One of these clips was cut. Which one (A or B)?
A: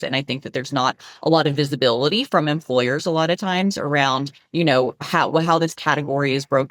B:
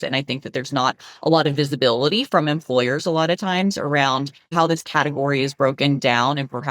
B